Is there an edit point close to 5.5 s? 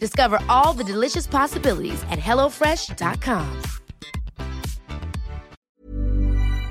yes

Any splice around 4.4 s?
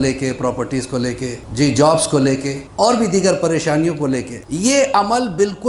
yes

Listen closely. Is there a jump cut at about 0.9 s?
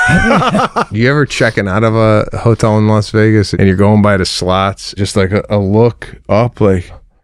yes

